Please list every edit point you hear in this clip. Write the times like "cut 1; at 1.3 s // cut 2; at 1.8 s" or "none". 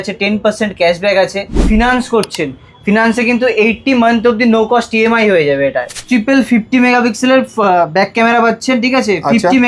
cut 1; at 1.6 s // cut 2; at 5.9 s